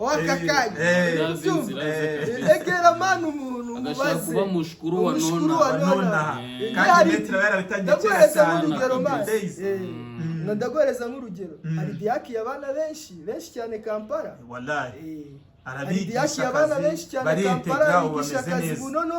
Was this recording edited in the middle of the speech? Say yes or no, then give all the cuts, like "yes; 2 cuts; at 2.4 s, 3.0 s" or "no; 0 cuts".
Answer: no; 0 cuts